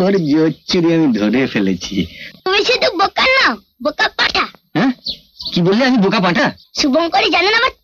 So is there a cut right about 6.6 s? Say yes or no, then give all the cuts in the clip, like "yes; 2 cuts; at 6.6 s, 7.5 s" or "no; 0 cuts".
yes; 2 cuts; at 2.3 s, 6.6 s